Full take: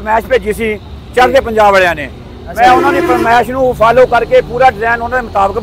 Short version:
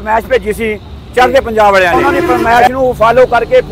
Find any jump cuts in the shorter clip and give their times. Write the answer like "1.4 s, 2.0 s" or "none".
1.9 s